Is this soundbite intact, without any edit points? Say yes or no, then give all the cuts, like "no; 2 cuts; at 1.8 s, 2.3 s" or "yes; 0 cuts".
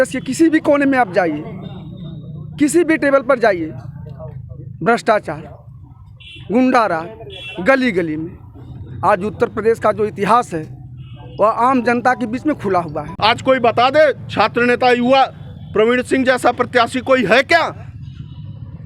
no; 1 cut; at 13.0 s